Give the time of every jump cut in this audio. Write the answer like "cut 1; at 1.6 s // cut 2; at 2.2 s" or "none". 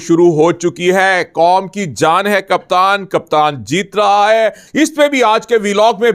cut 1; at 4.6 s